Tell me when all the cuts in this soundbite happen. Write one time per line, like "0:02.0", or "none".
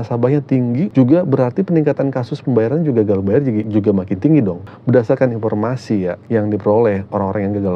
0:00.9
0:03.7
0:04.7
0:06.2